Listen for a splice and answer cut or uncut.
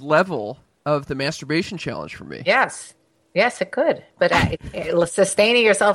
uncut